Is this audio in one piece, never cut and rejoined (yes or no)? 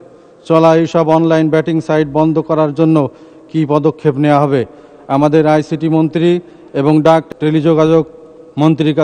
no